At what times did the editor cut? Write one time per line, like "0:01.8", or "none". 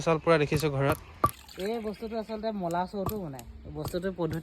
0:01.5